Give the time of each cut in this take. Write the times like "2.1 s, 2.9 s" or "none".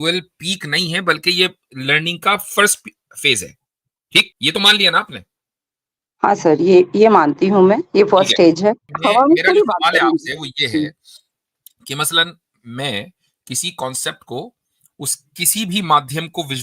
4.3 s, 8.9 s